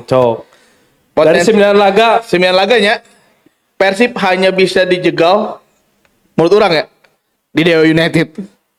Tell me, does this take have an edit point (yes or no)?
no